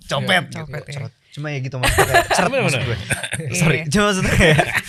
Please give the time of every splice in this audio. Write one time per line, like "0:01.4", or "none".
none